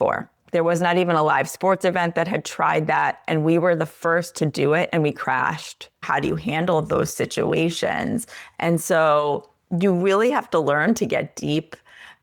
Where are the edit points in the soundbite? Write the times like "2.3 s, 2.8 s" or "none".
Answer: 6.0 s